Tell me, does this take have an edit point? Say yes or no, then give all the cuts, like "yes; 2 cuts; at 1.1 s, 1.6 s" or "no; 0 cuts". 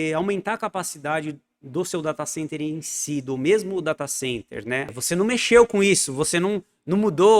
yes; 1 cut; at 4.9 s